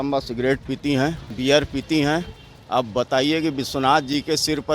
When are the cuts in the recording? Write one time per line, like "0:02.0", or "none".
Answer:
0:01.3